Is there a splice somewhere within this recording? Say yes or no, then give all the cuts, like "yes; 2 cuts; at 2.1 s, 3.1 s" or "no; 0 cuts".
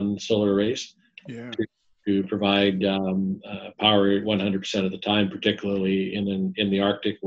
no; 0 cuts